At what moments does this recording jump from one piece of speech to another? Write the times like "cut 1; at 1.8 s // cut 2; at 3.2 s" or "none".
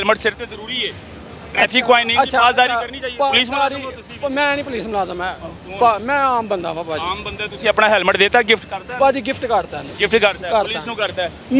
none